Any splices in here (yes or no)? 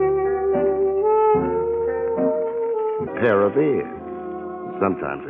no